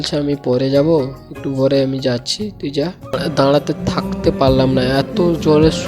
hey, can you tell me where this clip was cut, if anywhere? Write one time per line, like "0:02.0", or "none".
0:03.2

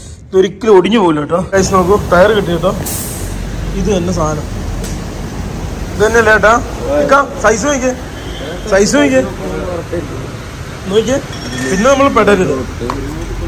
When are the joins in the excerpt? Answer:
0:01.5

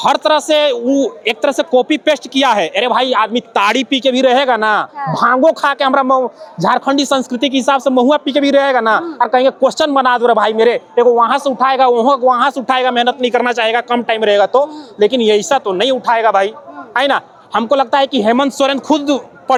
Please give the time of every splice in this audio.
none

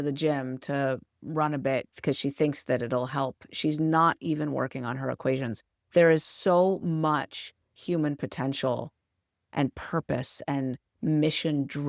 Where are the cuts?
0:01.9

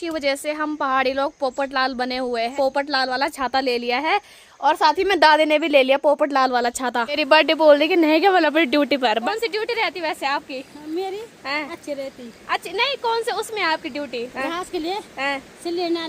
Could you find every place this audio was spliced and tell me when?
0:02.5
0:07.2
0:09.3
0:14.3

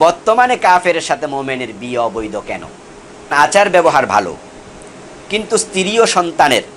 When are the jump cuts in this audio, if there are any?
0:03.3

